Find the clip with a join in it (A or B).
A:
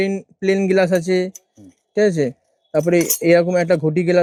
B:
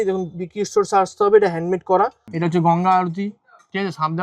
B